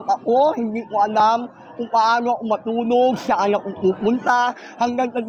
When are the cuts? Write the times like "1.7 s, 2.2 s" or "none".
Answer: none